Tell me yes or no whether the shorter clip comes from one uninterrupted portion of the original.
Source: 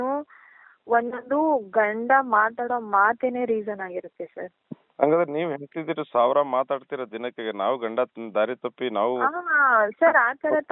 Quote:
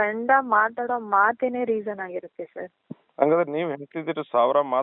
yes